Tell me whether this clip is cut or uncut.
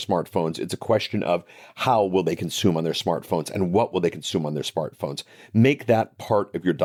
uncut